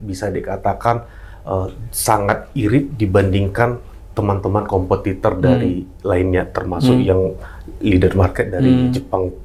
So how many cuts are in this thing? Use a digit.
0